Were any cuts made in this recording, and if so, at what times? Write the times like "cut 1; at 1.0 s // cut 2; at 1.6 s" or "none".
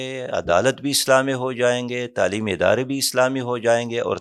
none